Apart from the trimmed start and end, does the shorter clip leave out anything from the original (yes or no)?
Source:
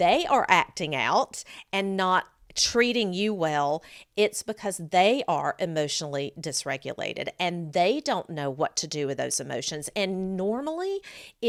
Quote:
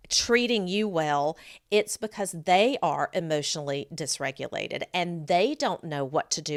no